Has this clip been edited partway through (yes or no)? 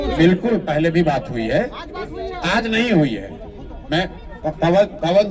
no